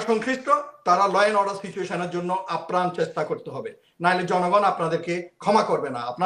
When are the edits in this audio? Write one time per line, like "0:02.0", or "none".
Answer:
none